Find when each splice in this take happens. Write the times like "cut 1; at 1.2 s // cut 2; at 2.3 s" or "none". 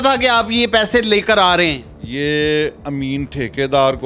none